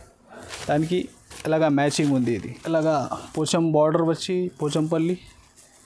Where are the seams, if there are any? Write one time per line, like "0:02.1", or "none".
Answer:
0:02.5